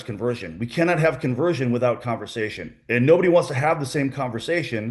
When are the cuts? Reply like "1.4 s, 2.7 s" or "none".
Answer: none